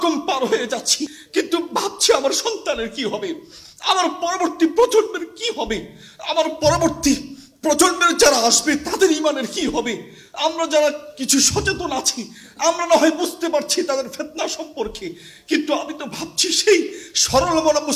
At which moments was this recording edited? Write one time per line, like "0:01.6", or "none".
0:01.2